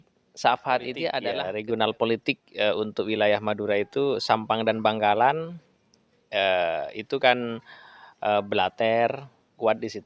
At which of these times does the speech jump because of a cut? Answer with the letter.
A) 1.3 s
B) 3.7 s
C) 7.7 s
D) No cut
A